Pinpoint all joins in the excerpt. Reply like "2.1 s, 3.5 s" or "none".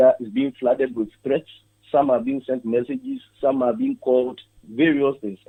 none